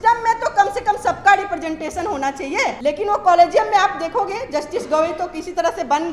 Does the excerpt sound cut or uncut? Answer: cut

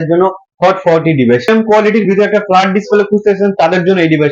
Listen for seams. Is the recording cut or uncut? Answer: cut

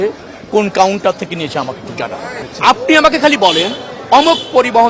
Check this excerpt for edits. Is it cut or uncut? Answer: cut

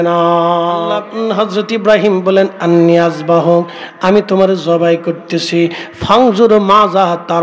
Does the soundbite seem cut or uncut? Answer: cut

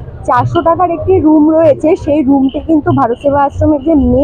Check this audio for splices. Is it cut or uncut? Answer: uncut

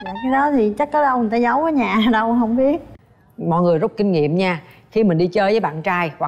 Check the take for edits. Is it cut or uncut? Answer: cut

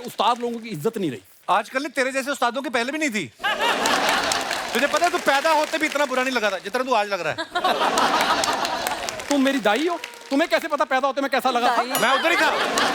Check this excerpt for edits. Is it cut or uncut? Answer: uncut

